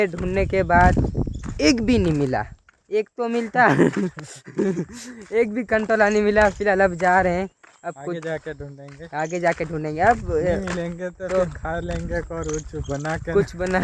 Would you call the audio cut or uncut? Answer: uncut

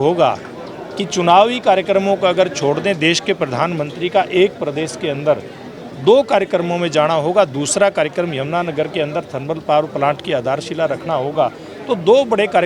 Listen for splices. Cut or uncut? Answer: uncut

